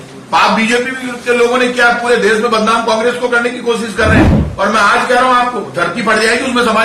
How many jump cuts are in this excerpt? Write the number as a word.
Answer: one